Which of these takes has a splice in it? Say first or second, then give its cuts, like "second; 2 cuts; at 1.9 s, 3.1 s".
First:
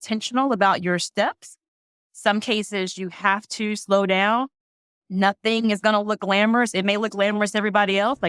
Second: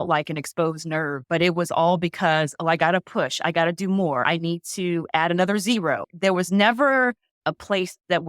second; 4 cuts; at 1.2 s, 4.2 s, 6.1 s, 7.3 s